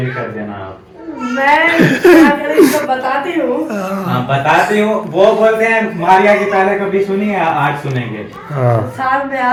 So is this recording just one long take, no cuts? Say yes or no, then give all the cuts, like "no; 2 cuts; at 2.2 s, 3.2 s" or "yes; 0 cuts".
yes; 0 cuts